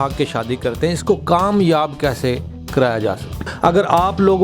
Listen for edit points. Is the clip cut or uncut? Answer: cut